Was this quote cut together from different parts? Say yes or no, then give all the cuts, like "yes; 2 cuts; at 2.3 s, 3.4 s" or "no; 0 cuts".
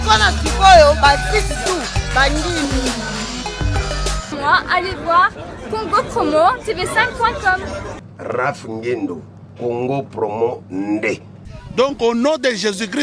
yes; 1 cut; at 4.3 s